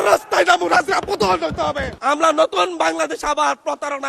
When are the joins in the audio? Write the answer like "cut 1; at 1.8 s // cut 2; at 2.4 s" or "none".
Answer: cut 1; at 2.0 s